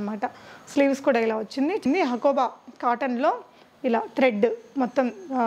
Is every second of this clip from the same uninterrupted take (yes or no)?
no